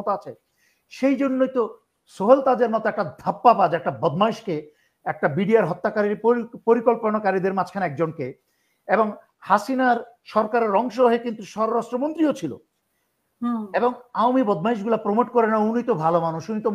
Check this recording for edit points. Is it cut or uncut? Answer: uncut